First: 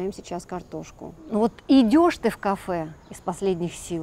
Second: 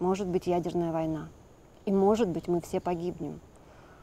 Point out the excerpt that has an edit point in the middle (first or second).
first